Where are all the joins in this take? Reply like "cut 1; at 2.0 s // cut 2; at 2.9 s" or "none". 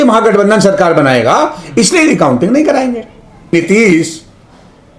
cut 1; at 3.5 s

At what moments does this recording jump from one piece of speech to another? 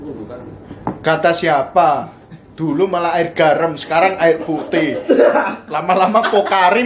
none

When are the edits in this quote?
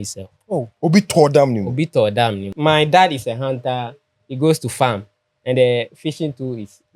cut 1; at 2.5 s

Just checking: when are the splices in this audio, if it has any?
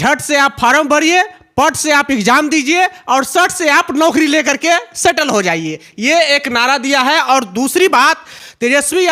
none

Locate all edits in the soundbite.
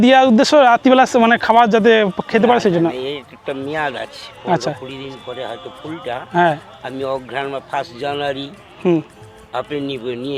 none

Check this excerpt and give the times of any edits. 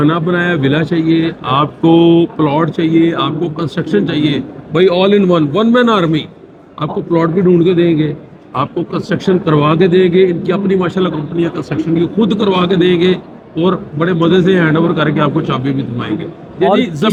none

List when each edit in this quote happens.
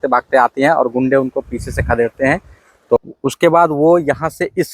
cut 1; at 3.0 s

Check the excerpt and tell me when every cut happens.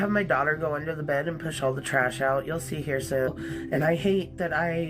cut 1; at 3.3 s

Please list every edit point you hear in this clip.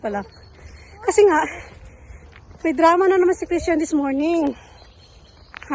none

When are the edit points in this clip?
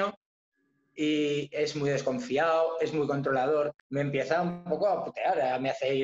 cut 1; at 3.8 s

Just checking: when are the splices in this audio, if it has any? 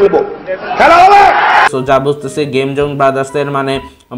cut 1; at 1.8 s

